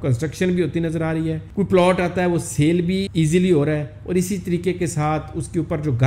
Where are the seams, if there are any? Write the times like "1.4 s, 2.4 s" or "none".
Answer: 3.1 s

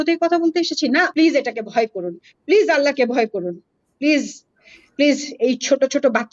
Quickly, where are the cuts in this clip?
1.1 s

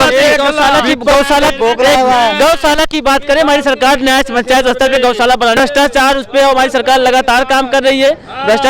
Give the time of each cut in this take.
5.6 s

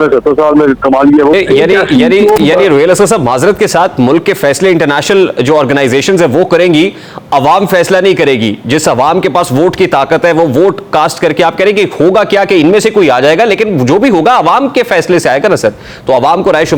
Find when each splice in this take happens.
1.4 s

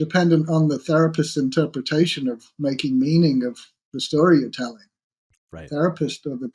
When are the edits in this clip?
none

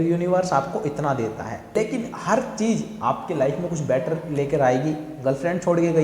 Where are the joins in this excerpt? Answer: 1.8 s

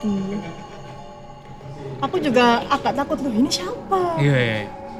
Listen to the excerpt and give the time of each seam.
none

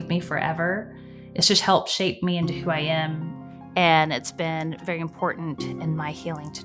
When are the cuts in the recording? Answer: 3.3 s

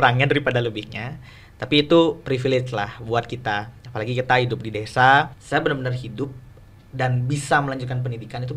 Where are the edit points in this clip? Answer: 5.4 s

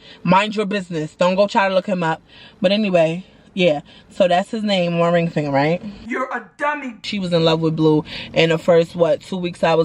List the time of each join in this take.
7.0 s

